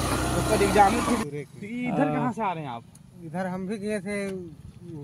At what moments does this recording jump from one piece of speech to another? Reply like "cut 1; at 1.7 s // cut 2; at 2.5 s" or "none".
cut 1; at 1.2 s